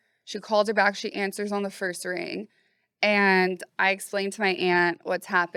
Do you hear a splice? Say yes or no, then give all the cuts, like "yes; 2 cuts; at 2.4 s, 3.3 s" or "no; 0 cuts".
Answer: no; 0 cuts